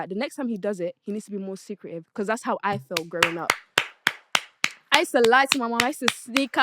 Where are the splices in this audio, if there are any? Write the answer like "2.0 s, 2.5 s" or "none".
none

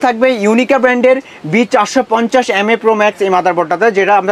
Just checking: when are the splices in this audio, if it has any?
none

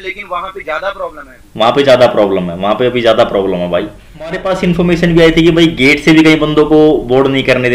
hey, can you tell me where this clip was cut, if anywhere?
4.5 s

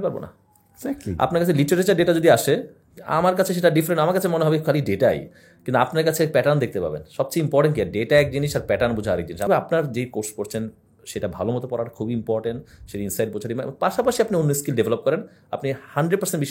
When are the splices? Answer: 9.5 s

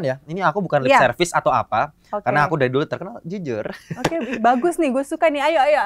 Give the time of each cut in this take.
none

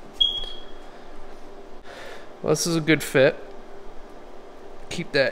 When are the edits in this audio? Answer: 1.9 s

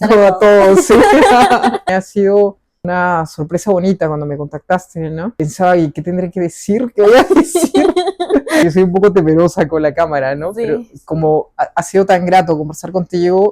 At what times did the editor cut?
1.8 s, 2.7 s, 5.3 s, 8.6 s

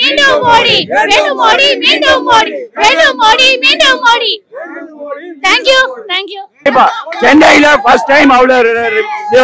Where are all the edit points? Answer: 6.7 s

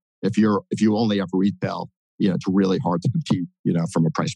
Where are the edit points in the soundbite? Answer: none

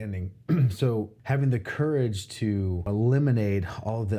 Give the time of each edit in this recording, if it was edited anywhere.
1.2 s, 2.9 s

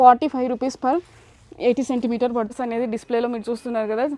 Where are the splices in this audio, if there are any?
2.5 s

